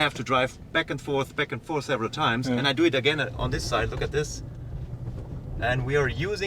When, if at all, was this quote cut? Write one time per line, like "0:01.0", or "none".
none